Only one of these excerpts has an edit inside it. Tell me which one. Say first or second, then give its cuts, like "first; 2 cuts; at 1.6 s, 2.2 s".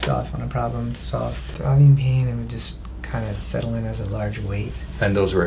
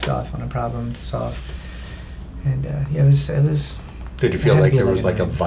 first; 1 cut; at 1.5 s